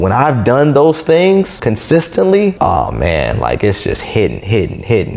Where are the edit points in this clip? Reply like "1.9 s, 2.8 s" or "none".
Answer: 1.6 s, 2.6 s